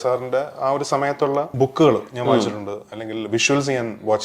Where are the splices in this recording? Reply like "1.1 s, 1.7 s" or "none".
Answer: 1.5 s